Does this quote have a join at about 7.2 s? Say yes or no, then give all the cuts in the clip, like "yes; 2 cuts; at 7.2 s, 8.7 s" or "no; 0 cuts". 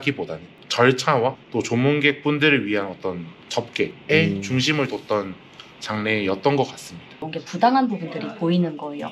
yes; 1 cut; at 7.2 s